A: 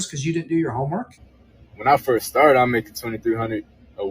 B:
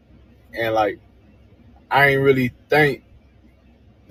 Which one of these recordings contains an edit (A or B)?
A